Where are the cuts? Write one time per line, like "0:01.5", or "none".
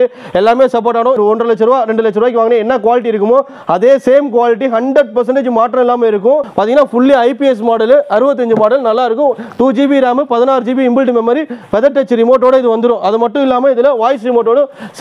0:01.2
0:06.5